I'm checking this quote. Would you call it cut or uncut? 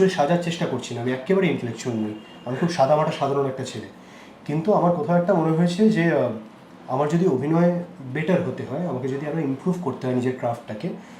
uncut